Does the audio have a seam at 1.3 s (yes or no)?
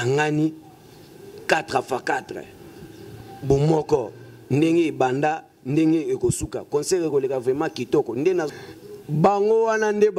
no